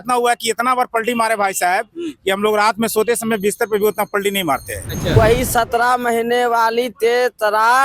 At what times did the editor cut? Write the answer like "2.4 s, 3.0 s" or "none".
5.1 s